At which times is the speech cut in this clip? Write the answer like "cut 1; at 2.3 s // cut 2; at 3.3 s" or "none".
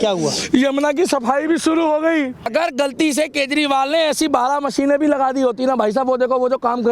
cut 1; at 2.5 s

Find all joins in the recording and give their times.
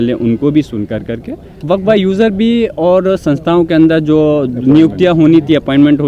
cut 1; at 1.5 s

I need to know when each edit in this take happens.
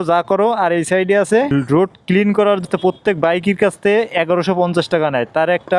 cut 1; at 1.6 s // cut 2; at 2.6 s

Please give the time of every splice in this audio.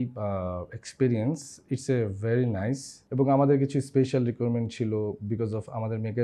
cut 1; at 2.9 s

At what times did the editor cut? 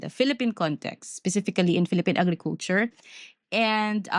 none

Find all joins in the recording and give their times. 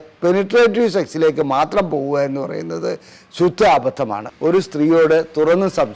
cut 1; at 4.3 s

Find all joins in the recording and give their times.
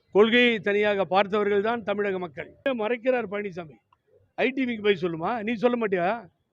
cut 1; at 2.7 s

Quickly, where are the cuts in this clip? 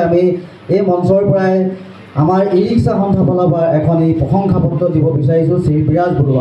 none

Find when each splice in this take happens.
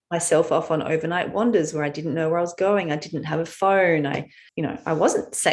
cut 1; at 4.4 s

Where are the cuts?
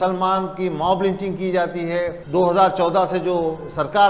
cut 1; at 2.2 s

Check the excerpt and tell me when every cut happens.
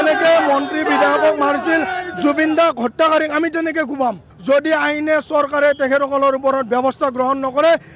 cut 1; at 4.3 s

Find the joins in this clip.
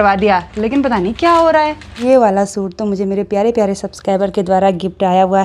cut 1; at 1.9 s

